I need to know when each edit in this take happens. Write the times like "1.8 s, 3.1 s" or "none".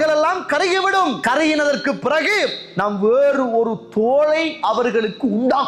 1.2 s